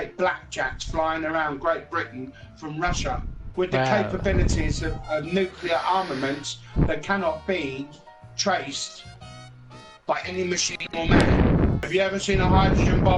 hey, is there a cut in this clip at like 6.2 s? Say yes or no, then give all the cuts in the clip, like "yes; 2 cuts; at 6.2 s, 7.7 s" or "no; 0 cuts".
no; 1 cut; at 11.9 s